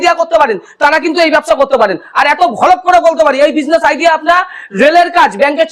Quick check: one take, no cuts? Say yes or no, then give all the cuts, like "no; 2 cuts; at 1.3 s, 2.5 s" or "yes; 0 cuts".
yes; 0 cuts